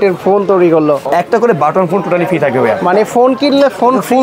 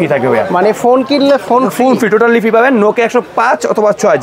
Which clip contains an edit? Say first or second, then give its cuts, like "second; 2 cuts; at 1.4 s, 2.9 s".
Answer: first; 1 cut; at 1.0 s